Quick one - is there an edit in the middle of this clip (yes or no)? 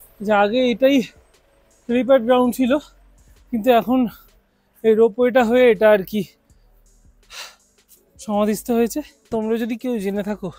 yes